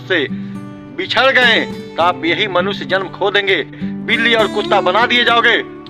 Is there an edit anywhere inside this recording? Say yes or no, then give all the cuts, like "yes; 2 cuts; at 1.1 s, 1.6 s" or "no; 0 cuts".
yes; 2 cuts; at 1.8 s, 3.8 s